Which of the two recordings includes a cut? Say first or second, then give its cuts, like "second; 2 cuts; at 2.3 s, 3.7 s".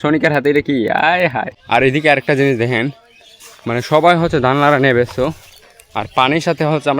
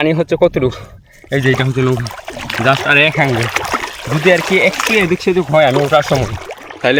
first; 1 cut; at 1.5 s